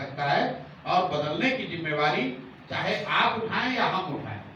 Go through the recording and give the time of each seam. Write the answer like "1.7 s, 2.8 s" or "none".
none